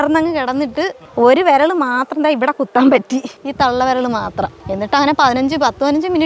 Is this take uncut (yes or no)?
no